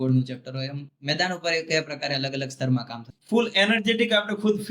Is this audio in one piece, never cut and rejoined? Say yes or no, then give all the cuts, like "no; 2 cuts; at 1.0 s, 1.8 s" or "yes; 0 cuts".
no; 1 cut; at 3.1 s